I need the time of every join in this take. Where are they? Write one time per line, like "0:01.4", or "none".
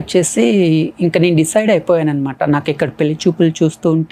none